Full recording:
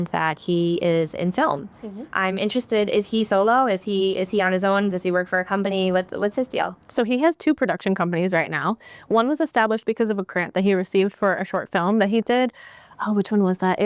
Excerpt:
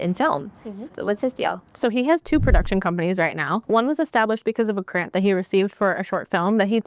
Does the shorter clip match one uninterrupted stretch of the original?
no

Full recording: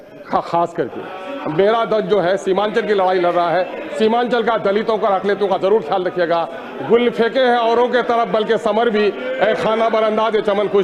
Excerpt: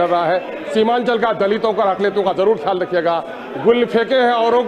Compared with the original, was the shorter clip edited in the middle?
no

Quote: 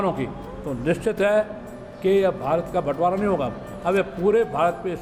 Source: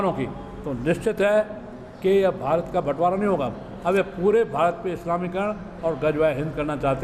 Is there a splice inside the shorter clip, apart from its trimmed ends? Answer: no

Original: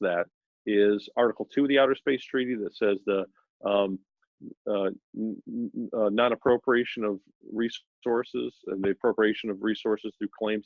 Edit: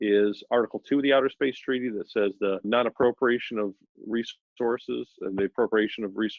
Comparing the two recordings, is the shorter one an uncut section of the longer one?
no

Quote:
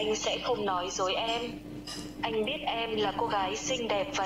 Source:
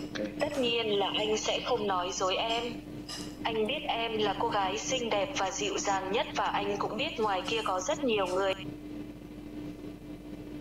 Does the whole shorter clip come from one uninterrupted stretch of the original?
yes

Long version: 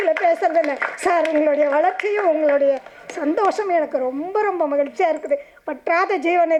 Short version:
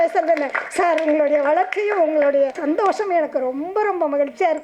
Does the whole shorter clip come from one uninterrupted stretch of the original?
no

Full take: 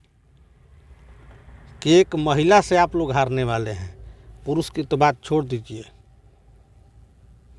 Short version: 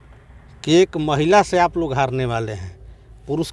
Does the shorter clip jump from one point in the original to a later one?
no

